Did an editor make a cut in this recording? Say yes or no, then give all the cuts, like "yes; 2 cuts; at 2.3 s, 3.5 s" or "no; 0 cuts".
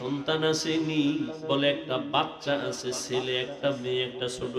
no; 0 cuts